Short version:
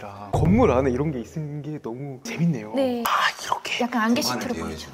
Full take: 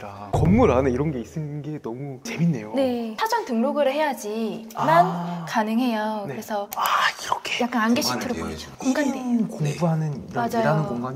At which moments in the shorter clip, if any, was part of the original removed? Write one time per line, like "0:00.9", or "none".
0:03.1